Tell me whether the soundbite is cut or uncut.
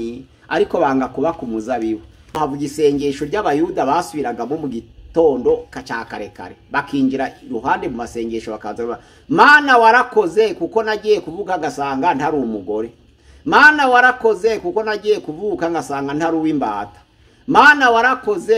cut